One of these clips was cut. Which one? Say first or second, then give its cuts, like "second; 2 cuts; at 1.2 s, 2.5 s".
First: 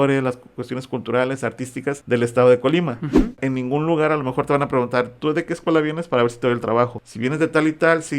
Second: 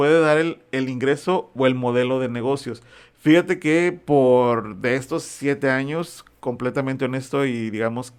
first; 3 cuts; at 2.0 s, 3.4 s, 7.0 s